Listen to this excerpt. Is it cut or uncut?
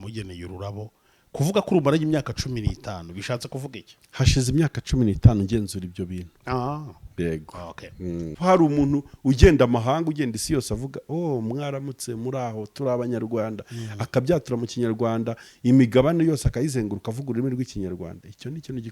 cut